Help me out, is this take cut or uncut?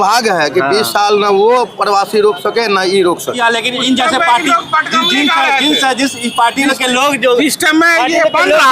cut